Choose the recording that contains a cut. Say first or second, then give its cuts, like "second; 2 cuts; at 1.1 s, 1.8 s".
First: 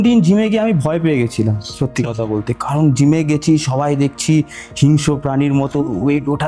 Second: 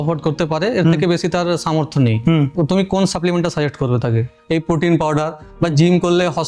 second; 2 cuts; at 2.5 s, 4.3 s